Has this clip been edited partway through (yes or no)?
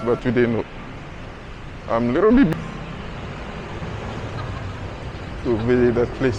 yes